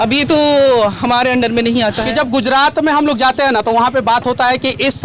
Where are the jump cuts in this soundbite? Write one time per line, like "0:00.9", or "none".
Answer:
0:02.0